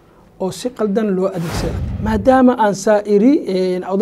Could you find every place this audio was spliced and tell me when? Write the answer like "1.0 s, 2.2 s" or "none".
1.6 s